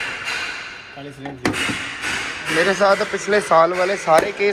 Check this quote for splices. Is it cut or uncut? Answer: uncut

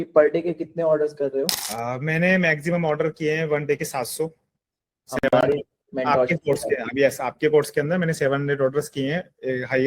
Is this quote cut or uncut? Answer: cut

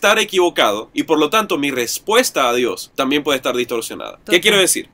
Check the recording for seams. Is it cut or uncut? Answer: uncut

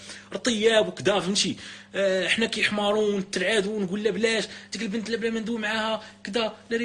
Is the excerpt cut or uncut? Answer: uncut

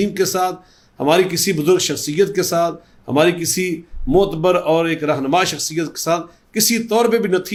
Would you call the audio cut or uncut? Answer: uncut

